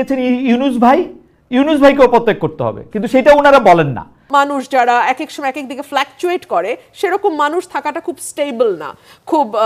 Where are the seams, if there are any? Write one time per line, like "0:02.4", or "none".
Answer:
0:04.2